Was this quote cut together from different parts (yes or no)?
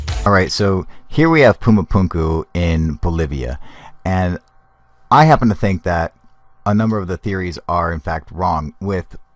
yes